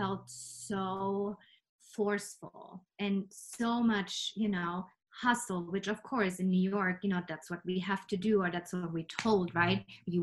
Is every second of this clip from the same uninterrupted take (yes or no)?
yes